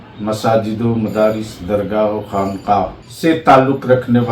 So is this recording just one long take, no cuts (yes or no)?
no